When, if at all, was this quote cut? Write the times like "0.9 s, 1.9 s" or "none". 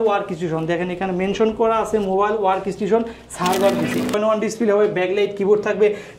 4.2 s